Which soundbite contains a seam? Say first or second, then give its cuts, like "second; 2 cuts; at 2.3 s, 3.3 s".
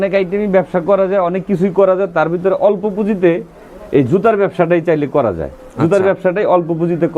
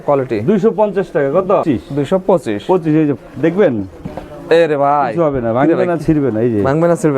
second; 1 cut; at 1.6 s